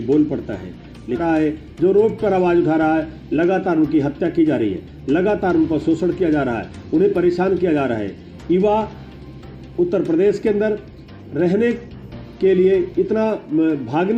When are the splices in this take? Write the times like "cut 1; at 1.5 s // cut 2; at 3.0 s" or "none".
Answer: cut 1; at 1.2 s